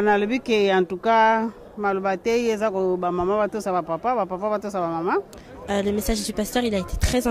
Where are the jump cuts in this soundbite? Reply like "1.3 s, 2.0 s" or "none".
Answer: 5.7 s